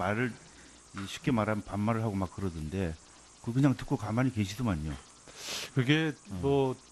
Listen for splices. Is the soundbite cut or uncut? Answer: cut